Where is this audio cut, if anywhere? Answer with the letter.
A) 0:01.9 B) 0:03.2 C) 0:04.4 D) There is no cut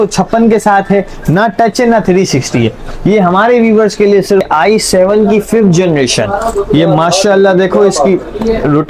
C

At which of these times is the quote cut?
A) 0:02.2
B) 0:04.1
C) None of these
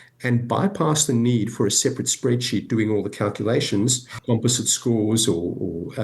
B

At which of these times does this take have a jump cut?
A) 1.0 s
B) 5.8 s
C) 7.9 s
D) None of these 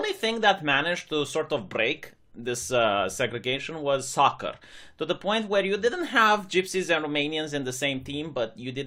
C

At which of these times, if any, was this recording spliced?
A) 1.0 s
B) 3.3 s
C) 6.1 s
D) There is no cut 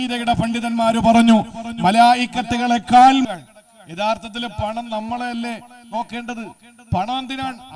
B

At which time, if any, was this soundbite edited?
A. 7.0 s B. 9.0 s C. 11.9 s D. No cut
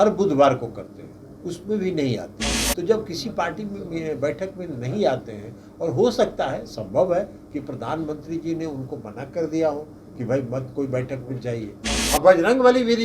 C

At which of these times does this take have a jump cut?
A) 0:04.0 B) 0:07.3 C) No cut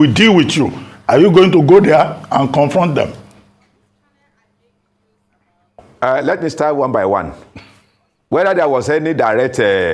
C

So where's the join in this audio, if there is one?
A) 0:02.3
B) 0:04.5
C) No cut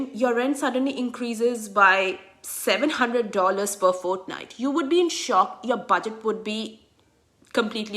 C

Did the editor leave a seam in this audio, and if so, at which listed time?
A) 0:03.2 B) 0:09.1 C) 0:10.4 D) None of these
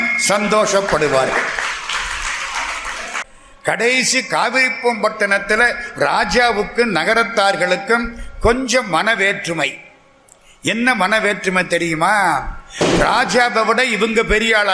A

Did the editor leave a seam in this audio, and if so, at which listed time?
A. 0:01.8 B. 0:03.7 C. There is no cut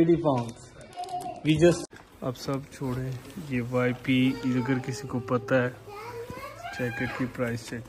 A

